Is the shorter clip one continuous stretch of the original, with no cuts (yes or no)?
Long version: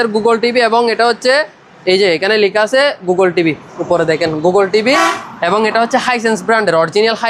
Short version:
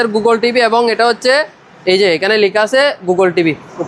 yes